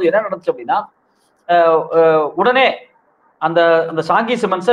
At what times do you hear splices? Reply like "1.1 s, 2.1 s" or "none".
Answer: none